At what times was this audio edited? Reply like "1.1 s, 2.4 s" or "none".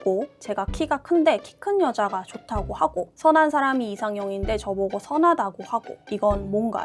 6.0 s